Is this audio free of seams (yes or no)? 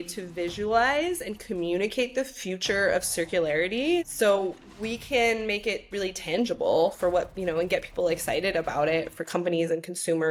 yes